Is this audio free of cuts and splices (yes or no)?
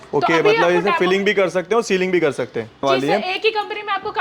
no